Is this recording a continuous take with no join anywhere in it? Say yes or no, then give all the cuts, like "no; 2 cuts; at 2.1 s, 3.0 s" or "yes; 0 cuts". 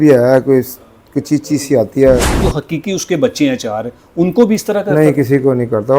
no; 1 cut; at 2.4 s